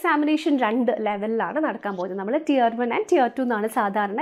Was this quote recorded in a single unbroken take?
yes; 0 cuts

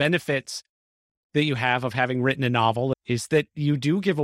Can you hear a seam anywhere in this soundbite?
yes; 1 cut; at 3.0 s

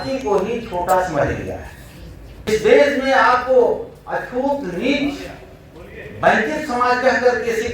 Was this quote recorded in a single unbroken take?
no; 1 cut; at 2.5 s

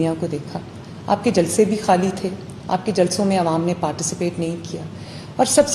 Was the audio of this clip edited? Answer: no; 0 cuts

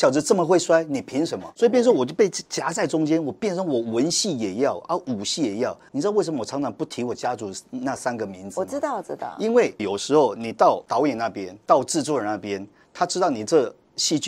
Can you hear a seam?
no; 0 cuts

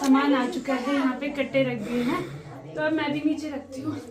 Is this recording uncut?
yes; 0 cuts

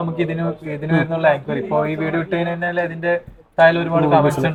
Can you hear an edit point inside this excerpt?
no; 0 cuts

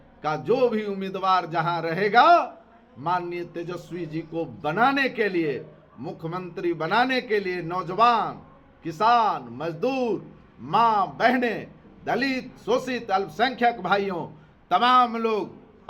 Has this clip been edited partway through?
no; 0 cuts

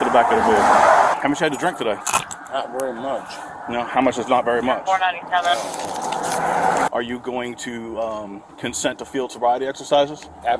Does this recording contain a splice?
yes; 3 cuts; at 1.1 s, 2.0 s, 6.9 s

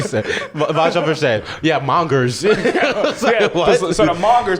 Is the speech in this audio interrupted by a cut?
no; 0 cuts

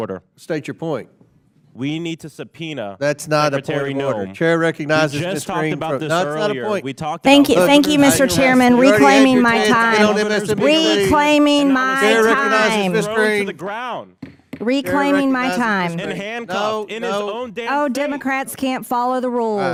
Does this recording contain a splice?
no; 0 cuts

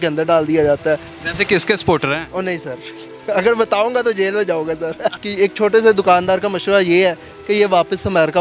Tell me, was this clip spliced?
yes; 2 cuts; at 1.2 s, 5.2 s

